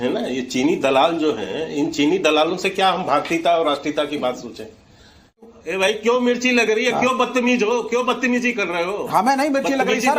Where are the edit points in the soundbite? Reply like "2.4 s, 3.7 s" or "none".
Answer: 5.4 s